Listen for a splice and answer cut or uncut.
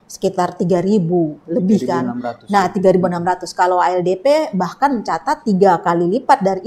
uncut